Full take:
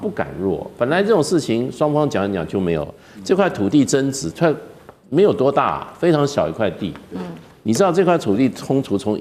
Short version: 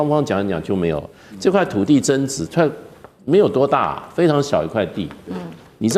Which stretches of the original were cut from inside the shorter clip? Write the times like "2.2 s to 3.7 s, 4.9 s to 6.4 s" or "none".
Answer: none